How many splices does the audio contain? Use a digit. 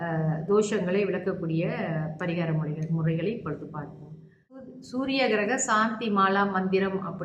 1